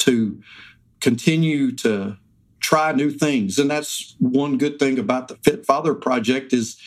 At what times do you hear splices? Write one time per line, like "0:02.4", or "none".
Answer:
none